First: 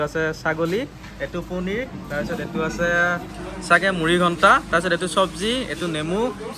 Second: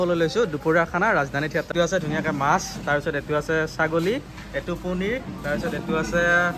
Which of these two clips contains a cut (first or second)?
second